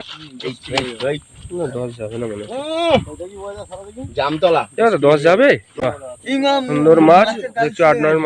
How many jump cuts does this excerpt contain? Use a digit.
1